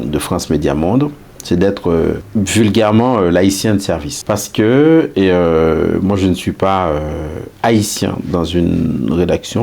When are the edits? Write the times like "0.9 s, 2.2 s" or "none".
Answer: 2.2 s, 4.1 s